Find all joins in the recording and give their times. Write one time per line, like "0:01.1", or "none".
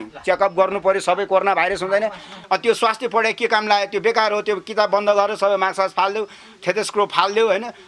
0:02.3